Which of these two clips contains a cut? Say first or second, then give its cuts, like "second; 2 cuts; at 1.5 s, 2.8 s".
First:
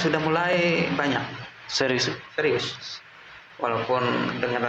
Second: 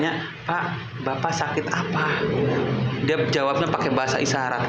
first; 1 cut; at 3.4 s